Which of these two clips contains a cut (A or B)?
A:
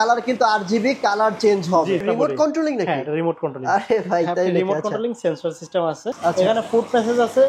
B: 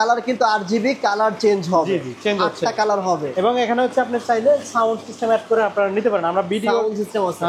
A